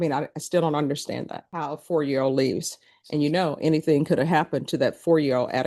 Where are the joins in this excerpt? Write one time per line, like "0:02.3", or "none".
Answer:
0:01.4